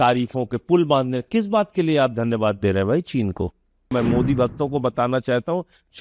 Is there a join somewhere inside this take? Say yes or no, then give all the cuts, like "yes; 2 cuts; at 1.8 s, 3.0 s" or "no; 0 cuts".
yes; 1 cut; at 3.9 s